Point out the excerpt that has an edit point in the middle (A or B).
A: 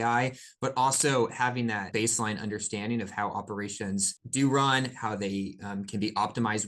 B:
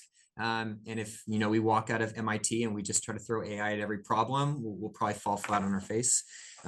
A